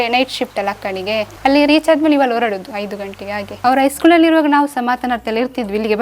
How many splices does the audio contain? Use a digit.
1